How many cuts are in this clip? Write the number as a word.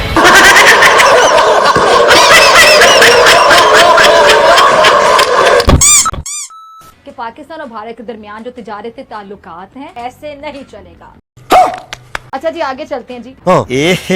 one